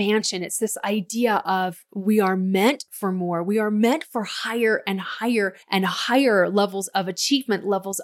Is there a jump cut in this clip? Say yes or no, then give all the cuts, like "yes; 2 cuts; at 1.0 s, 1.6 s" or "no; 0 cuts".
yes; 1 cut; at 5.6 s